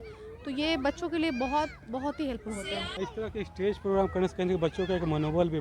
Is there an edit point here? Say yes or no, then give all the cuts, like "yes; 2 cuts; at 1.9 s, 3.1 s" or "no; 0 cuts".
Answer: yes; 1 cut; at 3.0 s